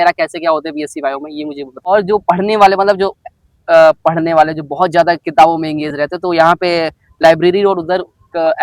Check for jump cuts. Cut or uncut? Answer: cut